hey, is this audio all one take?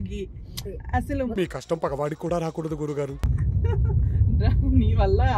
no; 1 cut; at 3.2 s

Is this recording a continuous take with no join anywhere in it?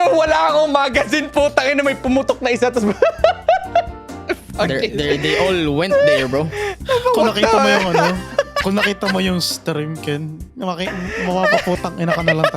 yes; 0 cuts

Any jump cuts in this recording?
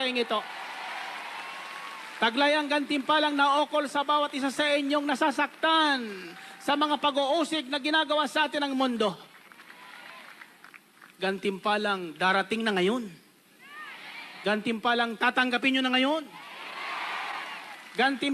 no; 0 cuts

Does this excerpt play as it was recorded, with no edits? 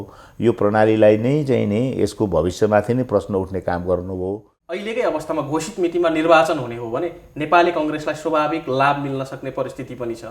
no; 1 cut; at 4.8 s

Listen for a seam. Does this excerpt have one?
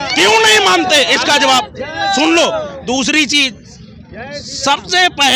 no; 0 cuts

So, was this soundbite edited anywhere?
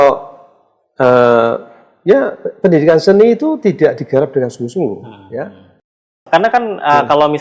yes; 1 cut; at 6.2 s

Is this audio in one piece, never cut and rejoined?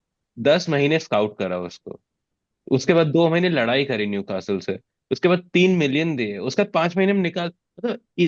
yes; 0 cuts

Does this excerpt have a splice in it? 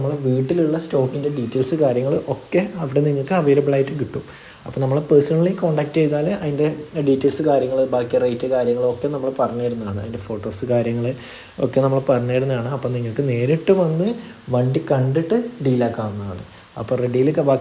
no; 0 cuts

